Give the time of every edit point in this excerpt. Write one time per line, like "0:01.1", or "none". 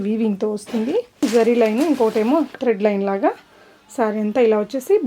0:01.2